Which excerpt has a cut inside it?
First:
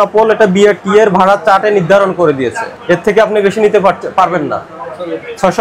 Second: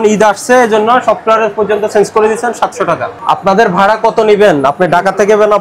second; 1 cut; at 3.1 s

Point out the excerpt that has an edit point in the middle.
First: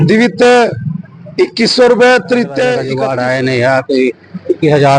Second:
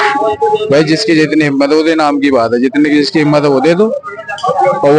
first; 1 cut; at 2.9 s

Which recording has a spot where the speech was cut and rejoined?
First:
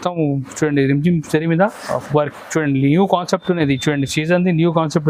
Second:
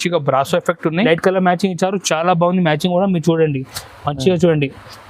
second; 1 cut; at 1.1 s

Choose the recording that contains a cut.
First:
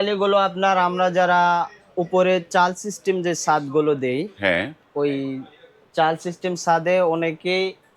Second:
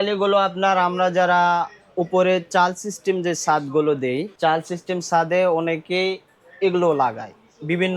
second; 1 cut; at 4.3 s

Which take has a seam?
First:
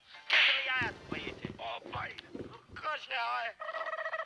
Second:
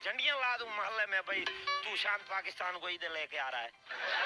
first; 1 cut; at 1.6 s

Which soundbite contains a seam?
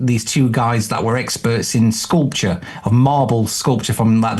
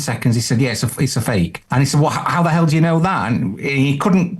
second; 1 cut; at 1.6 s

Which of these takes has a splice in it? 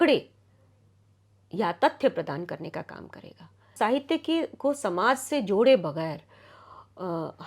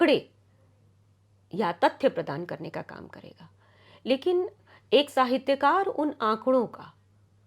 first; 1 cut; at 3.7 s

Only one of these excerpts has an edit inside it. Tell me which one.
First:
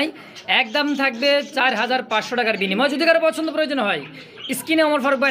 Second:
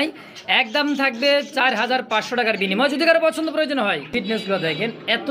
second; 1 cut; at 4.1 s

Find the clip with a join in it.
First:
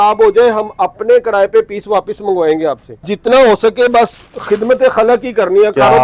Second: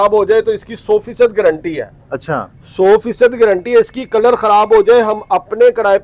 first; 1 cut; at 3.0 s

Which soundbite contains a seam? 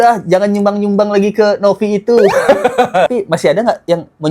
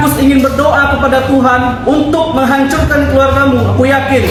first; 1 cut; at 3.1 s

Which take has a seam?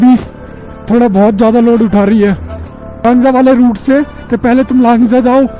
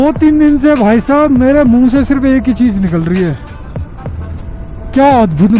first; 1 cut; at 3.0 s

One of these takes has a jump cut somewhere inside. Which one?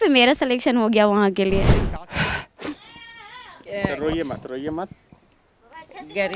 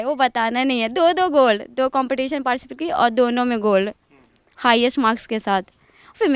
first; 1 cut; at 1.8 s

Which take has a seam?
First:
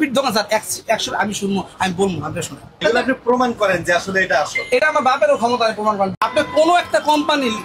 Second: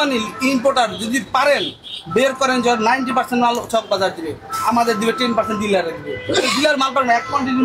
first; 2 cuts; at 2.7 s, 6.1 s

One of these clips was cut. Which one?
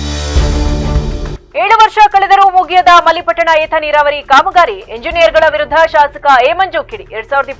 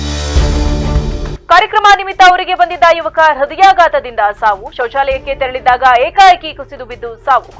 first; 1 cut; at 1.3 s

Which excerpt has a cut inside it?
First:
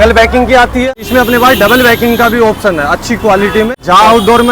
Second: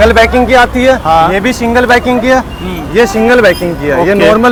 first; 2 cuts; at 1.0 s, 3.7 s

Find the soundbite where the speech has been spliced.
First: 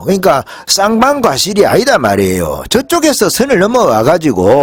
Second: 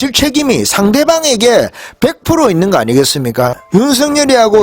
second; 1 cut; at 3.6 s

